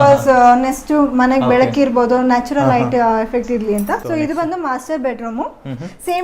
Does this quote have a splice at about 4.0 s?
yes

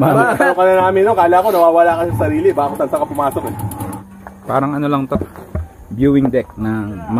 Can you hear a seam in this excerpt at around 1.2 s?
no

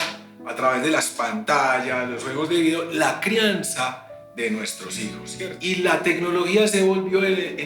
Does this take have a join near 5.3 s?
yes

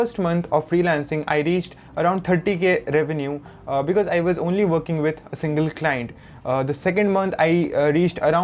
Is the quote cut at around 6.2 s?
no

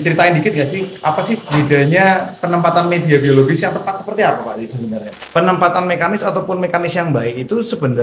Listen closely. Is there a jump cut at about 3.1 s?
no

